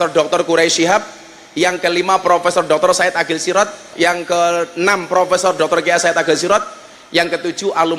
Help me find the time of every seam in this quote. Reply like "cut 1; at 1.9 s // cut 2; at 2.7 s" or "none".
cut 1; at 3.9 s

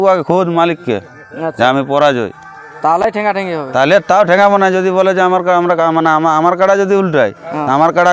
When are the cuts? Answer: none

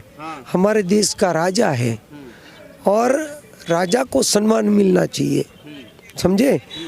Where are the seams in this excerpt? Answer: none

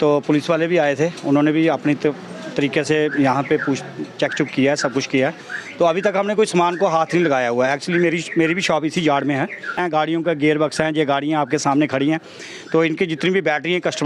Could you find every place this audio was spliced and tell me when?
cut 1; at 9.8 s

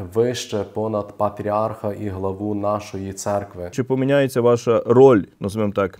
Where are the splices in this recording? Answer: cut 1; at 3.8 s

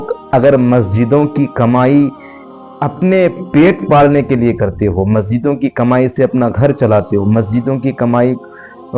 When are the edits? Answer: none

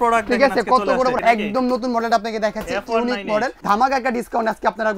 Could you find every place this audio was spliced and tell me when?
cut 1; at 1.2 s // cut 2; at 3.6 s

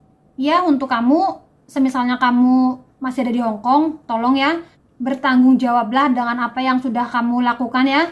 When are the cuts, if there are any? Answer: cut 1; at 4.9 s

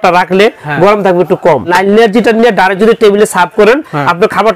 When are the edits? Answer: cut 1; at 1.7 s

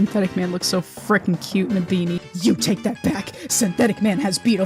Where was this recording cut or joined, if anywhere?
cut 1; at 2.2 s

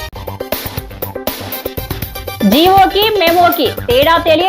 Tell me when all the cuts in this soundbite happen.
cut 1; at 2.1 s

